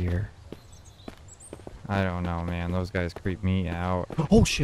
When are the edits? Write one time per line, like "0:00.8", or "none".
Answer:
0:01.7